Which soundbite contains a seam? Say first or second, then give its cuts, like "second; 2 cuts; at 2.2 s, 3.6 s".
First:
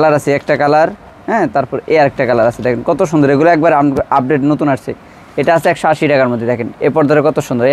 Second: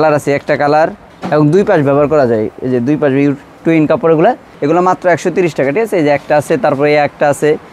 second; 2 cuts; at 1.1 s, 4.5 s